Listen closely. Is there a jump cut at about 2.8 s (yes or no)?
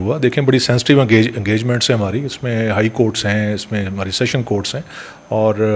no